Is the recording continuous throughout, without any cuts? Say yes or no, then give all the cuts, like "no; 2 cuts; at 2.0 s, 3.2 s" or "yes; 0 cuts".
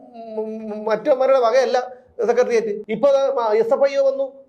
no; 1 cut; at 2.8 s